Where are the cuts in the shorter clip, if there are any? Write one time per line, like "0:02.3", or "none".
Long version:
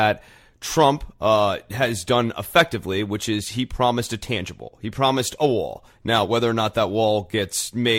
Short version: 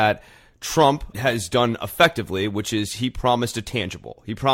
0:01.1